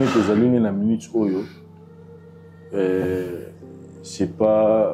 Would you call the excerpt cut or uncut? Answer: uncut